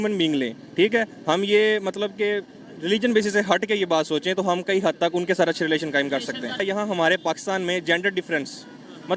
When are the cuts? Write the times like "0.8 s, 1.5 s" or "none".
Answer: 6.6 s